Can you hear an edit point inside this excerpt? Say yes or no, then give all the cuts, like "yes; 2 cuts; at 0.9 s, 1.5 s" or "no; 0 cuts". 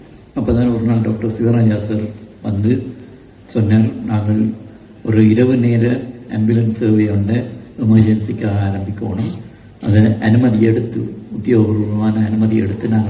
no; 0 cuts